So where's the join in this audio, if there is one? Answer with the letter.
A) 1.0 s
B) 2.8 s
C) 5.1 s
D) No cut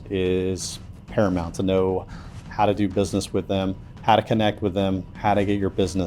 C